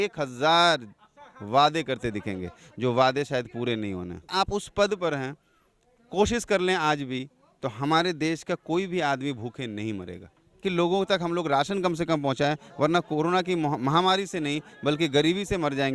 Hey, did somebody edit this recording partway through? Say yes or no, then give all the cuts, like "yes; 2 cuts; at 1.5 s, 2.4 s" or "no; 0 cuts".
yes; 2 cuts; at 4.3 s, 10.6 s